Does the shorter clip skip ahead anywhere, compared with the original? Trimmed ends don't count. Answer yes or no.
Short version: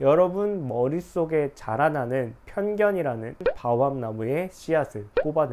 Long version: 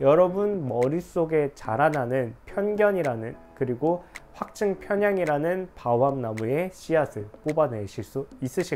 yes